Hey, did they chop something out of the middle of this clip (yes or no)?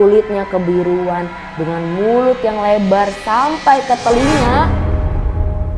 yes